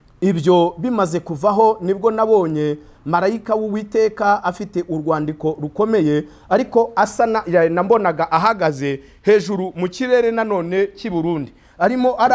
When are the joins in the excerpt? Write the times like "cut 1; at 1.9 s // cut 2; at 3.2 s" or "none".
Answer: none